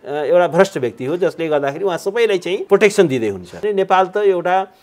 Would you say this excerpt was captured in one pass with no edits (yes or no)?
no